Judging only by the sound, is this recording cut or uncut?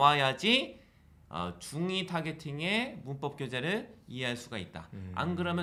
uncut